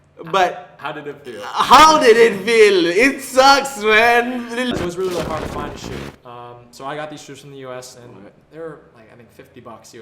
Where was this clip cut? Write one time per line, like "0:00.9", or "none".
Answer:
0:04.7